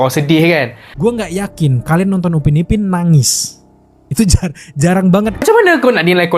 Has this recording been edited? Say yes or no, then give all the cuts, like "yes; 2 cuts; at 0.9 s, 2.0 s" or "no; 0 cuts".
yes; 1 cut; at 5.4 s